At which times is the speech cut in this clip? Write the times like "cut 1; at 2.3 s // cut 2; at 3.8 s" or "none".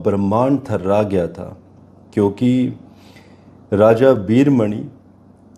none